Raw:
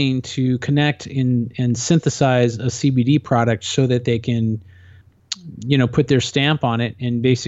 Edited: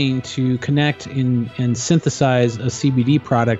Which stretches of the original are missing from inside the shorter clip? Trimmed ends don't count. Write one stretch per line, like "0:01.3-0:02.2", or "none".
none